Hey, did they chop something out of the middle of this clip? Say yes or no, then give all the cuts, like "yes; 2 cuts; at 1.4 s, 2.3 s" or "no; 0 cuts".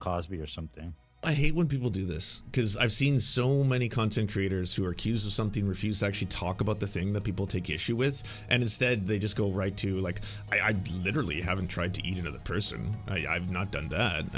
yes; 1 cut; at 1.2 s